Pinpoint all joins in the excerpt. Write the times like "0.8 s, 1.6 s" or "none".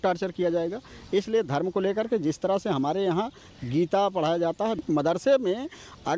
4.8 s